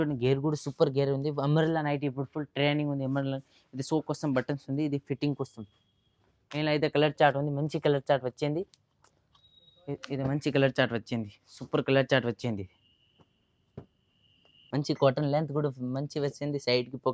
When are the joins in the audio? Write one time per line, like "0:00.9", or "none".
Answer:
none